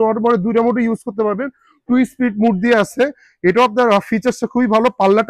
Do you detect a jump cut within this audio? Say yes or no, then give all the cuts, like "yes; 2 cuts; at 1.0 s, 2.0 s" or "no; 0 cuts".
no; 0 cuts